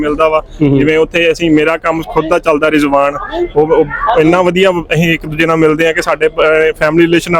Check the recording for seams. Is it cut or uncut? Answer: uncut